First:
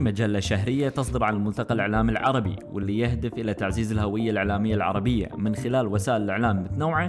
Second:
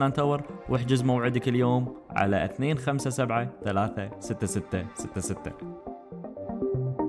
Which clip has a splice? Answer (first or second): second